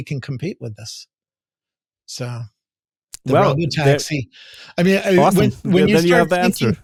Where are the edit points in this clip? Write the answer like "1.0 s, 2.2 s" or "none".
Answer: none